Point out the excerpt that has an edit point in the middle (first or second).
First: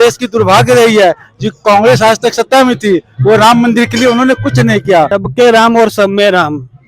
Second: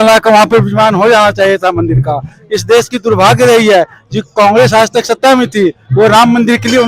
first